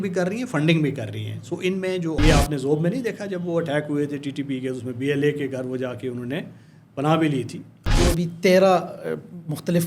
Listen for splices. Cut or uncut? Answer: cut